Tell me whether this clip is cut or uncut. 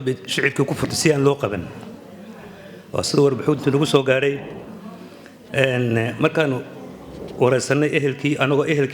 uncut